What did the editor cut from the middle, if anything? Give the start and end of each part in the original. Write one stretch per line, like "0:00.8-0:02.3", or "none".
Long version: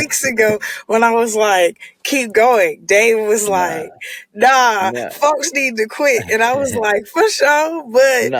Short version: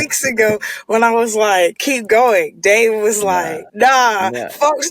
0:01.9-0:02.1
0:03.8-0:04.2